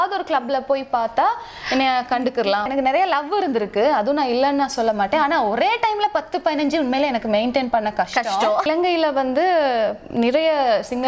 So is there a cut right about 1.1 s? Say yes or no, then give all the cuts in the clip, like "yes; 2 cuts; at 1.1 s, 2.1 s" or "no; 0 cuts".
no; 2 cuts; at 2.7 s, 8.7 s